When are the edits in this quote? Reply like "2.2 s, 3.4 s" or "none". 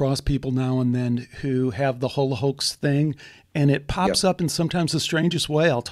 none